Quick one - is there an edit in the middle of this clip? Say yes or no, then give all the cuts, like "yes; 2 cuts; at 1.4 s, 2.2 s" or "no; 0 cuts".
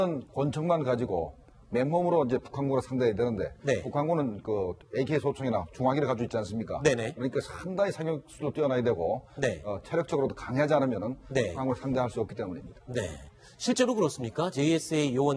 yes; 1 cut; at 2.0 s